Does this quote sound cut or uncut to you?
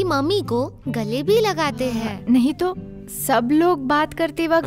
cut